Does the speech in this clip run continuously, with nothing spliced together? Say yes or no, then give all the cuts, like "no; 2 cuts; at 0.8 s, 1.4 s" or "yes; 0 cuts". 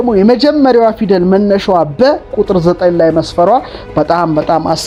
yes; 0 cuts